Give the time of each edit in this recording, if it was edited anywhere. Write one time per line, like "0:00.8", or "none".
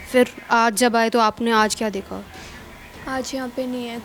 none